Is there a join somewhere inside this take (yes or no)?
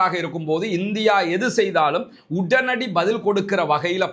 no